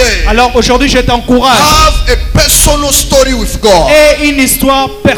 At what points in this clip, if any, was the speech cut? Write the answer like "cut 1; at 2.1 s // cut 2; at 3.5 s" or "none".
none